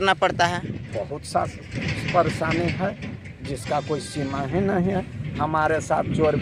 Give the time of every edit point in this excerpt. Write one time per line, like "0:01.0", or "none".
none